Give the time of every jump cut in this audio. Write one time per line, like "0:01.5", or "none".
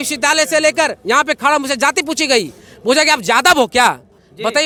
none